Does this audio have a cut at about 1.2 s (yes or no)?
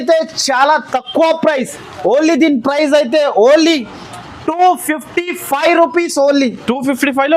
no